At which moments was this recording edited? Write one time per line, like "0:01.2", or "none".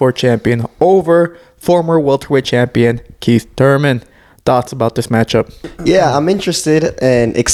none